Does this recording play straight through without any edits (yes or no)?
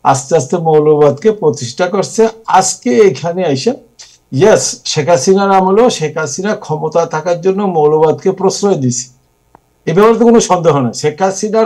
yes